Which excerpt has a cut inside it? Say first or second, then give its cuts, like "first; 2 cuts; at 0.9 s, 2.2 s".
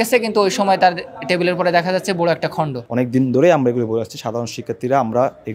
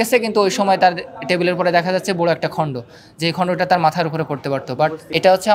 first; 1 cut; at 2.8 s